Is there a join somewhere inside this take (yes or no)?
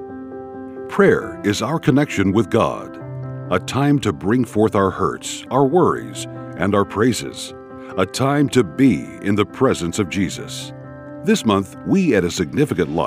yes